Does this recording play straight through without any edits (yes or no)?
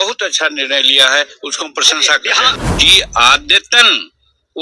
no